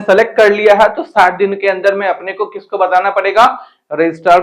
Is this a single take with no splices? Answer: yes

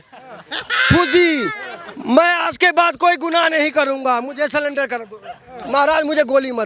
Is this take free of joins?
yes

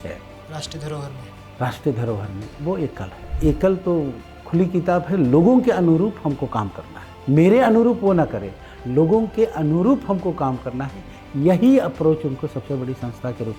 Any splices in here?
yes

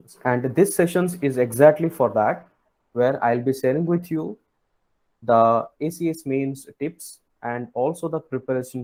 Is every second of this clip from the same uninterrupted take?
yes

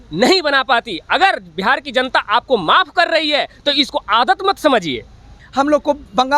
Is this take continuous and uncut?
no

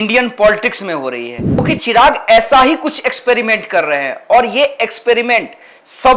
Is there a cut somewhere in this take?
yes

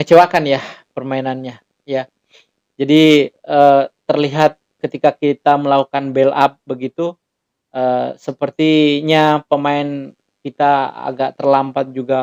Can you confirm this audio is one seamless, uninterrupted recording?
yes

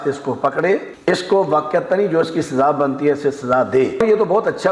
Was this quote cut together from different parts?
yes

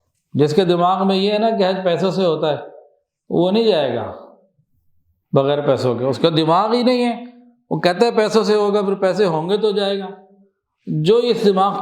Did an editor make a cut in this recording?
no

